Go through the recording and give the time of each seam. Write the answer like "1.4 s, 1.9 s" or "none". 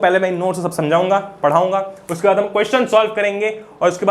none